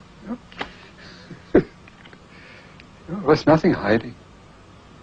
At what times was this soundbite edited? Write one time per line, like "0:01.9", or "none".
none